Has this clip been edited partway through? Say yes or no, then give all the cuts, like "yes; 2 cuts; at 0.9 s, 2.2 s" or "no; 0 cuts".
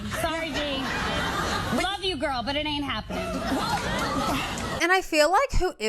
yes; 1 cut; at 4.7 s